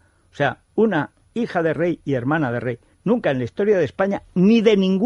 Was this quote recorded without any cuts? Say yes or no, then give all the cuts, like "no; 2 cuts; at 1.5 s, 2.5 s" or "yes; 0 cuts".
no; 1 cut; at 4.1 s